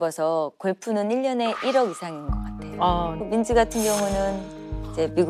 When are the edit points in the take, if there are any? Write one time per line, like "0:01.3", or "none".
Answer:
0:03.2